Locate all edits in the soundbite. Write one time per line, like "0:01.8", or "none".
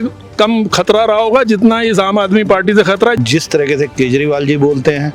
0:03.2